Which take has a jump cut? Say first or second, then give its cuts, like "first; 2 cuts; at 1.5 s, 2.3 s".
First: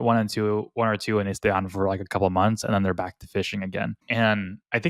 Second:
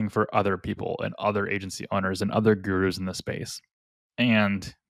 first; 1 cut; at 4.0 s